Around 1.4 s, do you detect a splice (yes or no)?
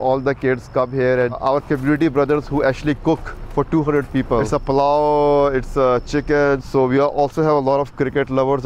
yes